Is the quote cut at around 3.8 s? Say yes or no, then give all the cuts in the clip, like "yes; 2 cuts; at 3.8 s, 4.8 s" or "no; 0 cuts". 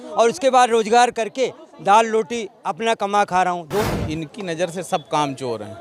yes; 1 cut; at 3.8 s